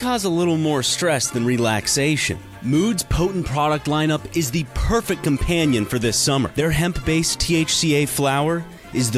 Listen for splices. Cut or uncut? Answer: uncut